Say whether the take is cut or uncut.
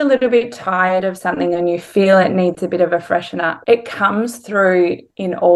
uncut